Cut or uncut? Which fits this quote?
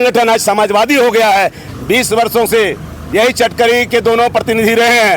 cut